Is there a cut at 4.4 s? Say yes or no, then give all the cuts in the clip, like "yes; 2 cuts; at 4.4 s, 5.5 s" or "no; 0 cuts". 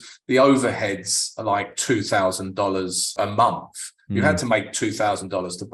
no; 1 cut; at 3.1 s